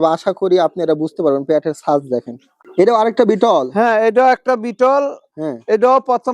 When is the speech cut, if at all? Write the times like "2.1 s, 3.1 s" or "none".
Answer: 2.6 s